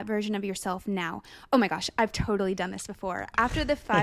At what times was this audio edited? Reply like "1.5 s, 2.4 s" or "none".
none